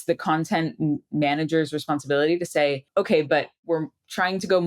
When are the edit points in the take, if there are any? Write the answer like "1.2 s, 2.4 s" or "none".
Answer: 2.8 s, 3.6 s